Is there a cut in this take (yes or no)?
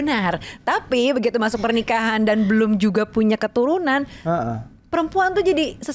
no